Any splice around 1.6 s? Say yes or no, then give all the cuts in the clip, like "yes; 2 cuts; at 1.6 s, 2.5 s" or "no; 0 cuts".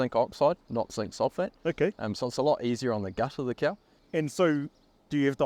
no; 1 cut; at 3.9 s